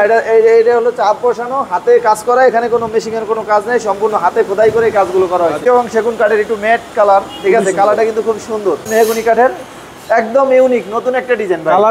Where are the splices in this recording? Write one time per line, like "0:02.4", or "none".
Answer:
0:05.6
0:08.9